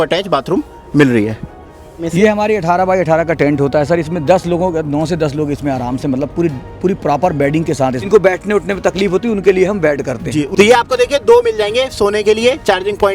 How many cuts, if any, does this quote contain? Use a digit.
3